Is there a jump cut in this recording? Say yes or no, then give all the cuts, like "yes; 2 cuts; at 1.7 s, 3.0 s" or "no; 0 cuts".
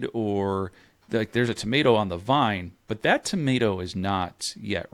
no; 0 cuts